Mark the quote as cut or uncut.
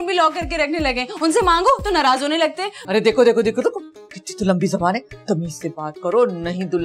cut